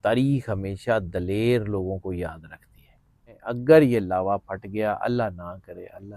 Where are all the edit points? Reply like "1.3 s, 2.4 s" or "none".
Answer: 3.4 s